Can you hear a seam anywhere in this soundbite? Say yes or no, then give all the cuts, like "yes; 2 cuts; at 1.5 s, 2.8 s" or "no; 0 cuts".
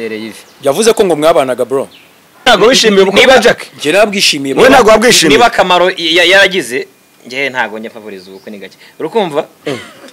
yes; 1 cut; at 2.5 s